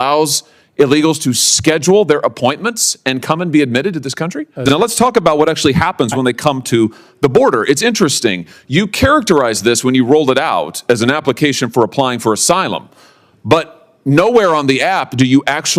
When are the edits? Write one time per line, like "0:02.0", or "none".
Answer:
0:04.6